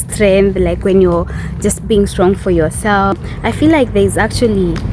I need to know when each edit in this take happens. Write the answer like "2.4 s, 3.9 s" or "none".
3.3 s

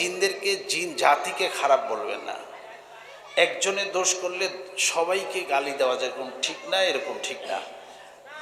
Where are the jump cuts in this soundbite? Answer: none

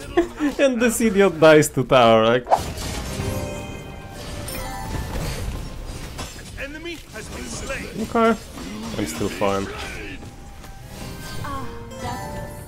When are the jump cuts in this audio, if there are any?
2.6 s

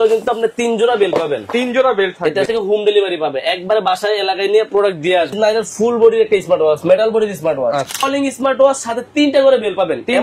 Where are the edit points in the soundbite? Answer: 2.5 s, 5.3 s, 7.9 s

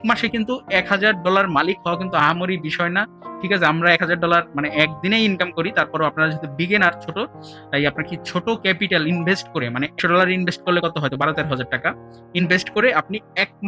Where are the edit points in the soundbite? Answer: 10.0 s

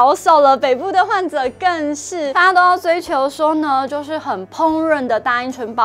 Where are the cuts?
2.3 s

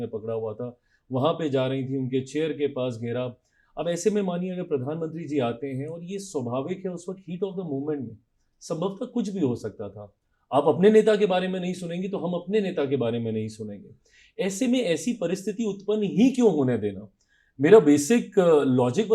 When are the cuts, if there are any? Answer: none

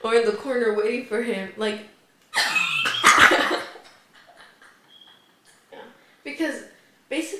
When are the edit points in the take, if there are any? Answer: 5.7 s

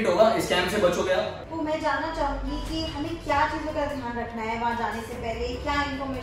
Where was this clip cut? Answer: 1.4 s

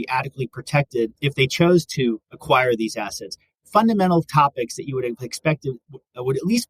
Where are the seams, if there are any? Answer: 1.2 s, 2.3 s

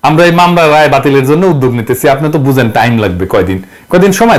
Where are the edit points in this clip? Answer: none

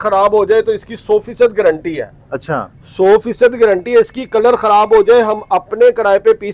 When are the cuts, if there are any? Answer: none

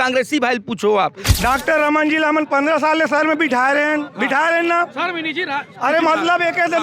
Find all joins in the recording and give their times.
1.2 s

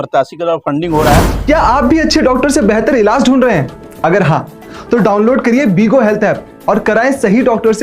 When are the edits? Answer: 1.3 s

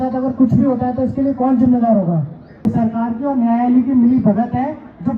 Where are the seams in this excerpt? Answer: 2.6 s

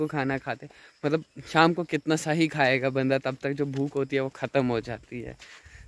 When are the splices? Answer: none

